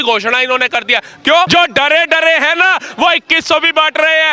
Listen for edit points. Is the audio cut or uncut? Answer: cut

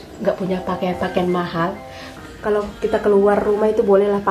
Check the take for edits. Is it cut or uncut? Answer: cut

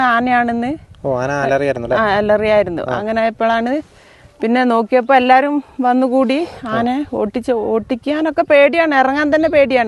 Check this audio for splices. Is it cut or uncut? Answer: uncut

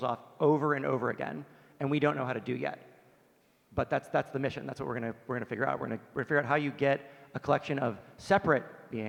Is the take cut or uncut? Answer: uncut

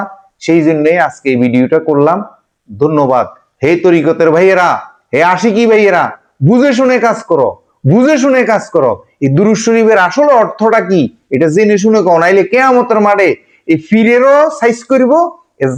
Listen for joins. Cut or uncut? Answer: uncut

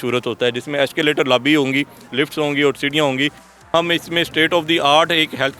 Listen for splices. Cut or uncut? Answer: cut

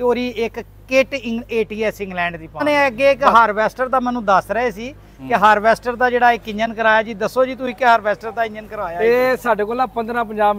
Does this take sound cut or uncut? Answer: cut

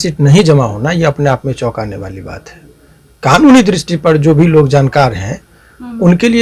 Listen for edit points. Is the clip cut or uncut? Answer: uncut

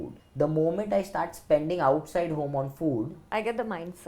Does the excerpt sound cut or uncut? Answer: uncut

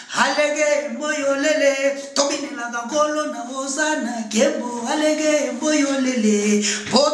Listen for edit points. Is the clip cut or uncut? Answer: uncut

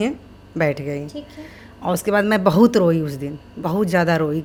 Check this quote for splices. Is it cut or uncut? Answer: uncut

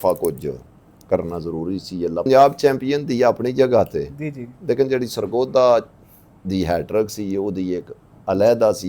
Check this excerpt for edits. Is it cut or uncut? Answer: cut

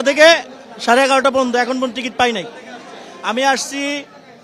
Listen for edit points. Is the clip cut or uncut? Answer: uncut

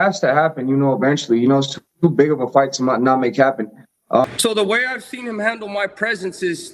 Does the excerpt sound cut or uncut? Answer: cut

